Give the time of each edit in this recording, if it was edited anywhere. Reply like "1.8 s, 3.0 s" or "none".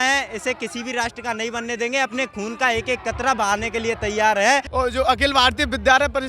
4.7 s